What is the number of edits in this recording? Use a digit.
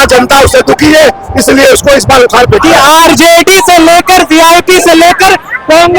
1